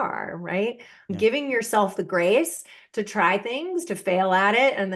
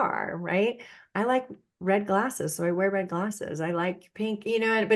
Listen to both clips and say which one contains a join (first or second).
first